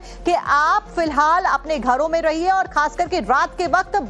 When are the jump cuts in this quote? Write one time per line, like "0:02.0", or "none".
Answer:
0:02.3